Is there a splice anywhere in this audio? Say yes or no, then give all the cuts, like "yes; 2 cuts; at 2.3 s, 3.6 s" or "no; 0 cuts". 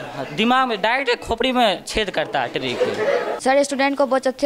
yes; 1 cut; at 3.3 s